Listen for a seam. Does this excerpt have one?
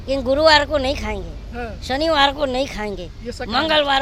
no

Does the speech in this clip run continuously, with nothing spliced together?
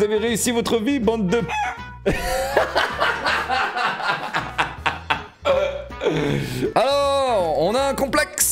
no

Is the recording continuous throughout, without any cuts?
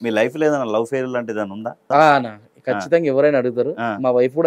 no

